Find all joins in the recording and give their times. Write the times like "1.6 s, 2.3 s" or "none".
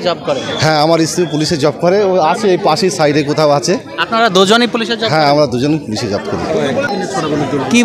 6.9 s